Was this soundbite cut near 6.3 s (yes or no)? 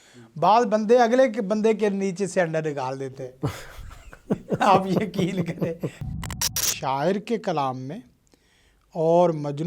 yes